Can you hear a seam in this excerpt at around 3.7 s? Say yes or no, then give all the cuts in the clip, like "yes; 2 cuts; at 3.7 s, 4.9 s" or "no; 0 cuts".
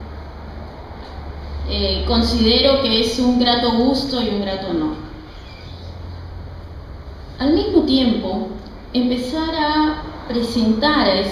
yes; 1 cut; at 3.7 s